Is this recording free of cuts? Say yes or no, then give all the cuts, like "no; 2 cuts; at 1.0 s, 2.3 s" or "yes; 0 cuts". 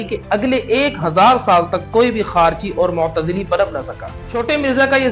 no; 1 cut; at 4.1 s